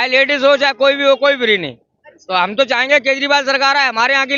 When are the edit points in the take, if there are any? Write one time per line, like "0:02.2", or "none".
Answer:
none